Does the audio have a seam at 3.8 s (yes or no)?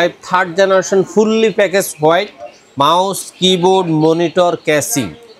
no